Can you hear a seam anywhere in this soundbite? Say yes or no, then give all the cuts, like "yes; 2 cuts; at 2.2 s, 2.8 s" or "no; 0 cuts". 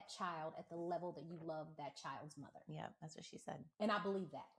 no; 0 cuts